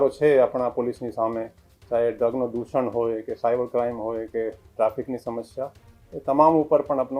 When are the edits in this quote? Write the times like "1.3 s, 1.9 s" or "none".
none